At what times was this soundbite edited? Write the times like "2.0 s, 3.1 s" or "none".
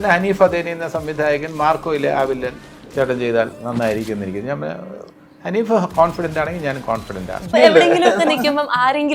7.5 s